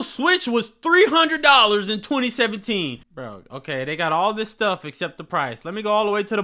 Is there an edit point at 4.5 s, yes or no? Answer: no